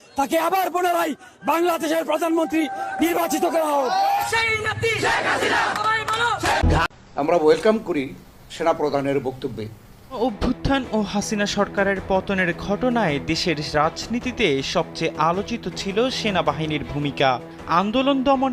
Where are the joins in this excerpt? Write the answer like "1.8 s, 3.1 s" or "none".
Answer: 10.2 s

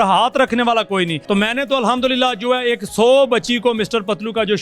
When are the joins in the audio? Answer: 1.2 s

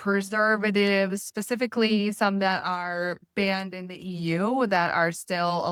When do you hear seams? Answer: none

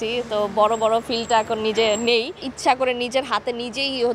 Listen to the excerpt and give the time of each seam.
2.5 s

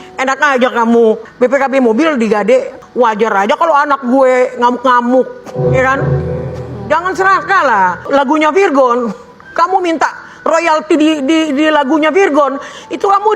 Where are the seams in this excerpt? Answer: 1.3 s, 2.8 s, 8.1 s

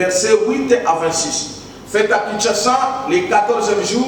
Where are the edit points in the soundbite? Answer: none

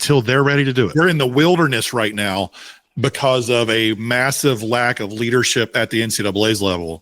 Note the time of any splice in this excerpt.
0.9 s

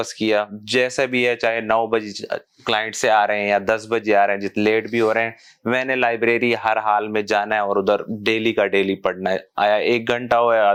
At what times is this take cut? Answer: none

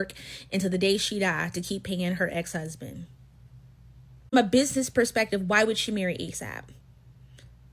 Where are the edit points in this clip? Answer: 2.0 s

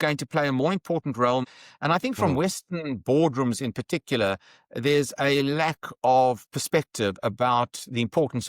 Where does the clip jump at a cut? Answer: 1.4 s

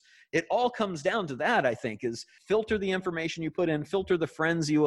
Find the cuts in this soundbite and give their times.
2.3 s

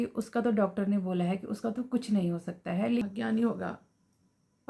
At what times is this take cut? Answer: 3.0 s

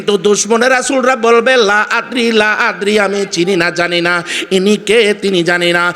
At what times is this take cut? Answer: none

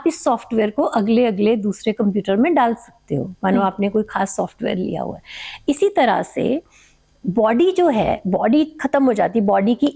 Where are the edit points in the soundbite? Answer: none

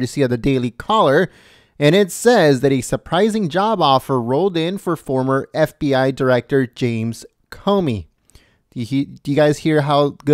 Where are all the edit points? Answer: none

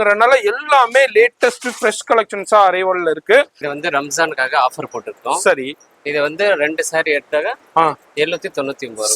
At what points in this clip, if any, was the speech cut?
3.6 s

